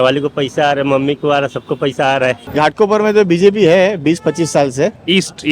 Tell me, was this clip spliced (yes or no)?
yes